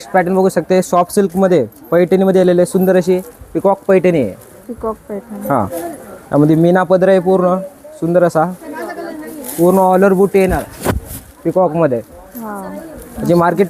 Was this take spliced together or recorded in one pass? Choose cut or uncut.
uncut